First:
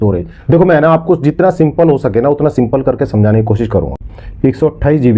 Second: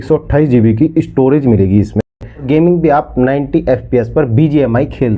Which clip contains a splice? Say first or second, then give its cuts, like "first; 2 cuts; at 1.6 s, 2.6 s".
second; 1 cut; at 2.2 s